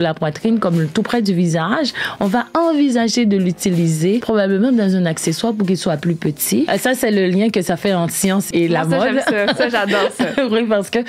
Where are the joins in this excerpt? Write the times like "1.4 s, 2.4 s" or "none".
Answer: 4.2 s, 6.7 s, 8.5 s